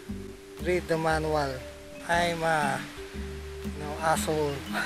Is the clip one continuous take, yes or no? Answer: no